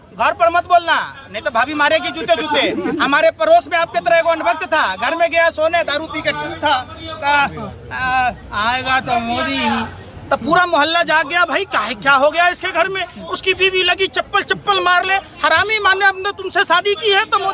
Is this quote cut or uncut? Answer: uncut